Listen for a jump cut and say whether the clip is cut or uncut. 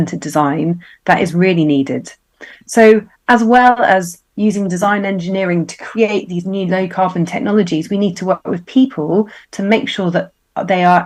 uncut